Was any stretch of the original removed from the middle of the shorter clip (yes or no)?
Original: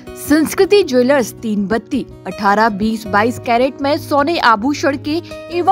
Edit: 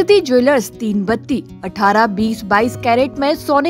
no